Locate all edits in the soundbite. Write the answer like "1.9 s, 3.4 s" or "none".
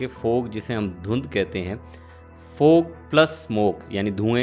none